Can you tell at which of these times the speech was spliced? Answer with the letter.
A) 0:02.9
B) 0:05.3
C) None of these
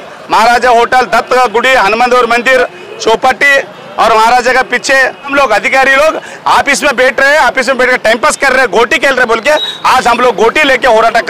B